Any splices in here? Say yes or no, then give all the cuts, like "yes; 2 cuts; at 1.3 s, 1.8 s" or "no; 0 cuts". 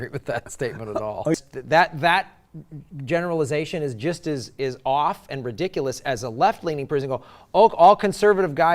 yes; 1 cut; at 1.3 s